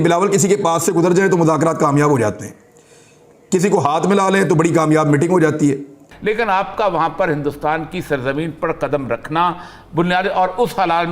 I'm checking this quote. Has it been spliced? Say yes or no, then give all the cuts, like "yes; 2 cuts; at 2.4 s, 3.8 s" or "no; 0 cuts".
yes; 1 cut; at 6.0 s